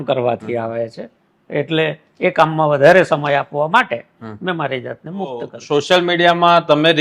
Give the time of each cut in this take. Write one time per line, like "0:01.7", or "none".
0:05.6